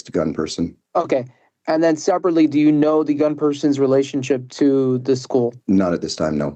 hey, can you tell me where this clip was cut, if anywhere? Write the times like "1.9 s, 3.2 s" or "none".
5.0 s